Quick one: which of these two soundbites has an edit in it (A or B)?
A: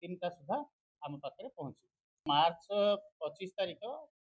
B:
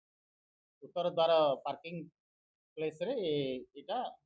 A